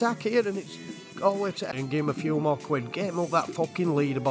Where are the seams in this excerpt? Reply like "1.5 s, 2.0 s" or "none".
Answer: 1.7 s